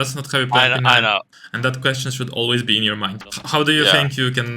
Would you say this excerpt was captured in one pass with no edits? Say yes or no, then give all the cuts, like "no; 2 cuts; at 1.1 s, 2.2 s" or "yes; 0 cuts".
no; 2 cuts; at 1.3 s, 3.2 s